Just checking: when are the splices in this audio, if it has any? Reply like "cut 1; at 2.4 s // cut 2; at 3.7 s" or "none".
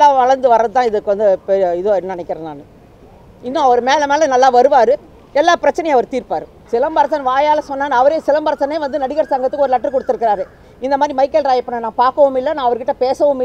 cut 1; at 6.5 s